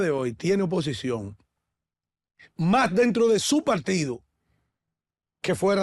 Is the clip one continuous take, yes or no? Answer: yes